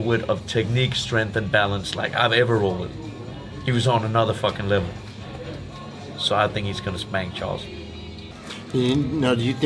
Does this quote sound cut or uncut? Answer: cut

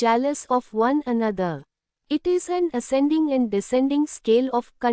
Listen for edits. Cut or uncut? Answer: cut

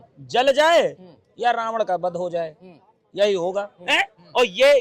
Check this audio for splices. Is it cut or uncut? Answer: cut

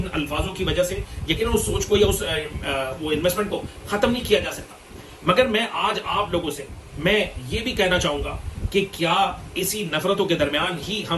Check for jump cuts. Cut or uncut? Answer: uncut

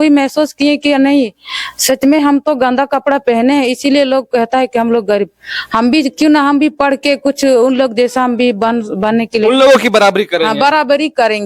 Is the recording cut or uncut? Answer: uncut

